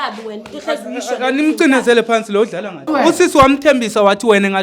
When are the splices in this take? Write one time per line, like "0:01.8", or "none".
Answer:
0:02.9